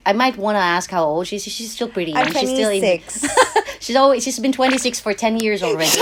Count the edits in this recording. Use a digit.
0